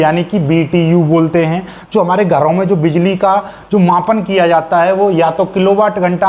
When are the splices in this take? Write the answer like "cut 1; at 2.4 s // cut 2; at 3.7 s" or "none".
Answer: none